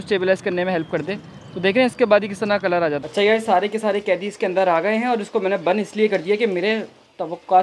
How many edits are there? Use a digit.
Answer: 1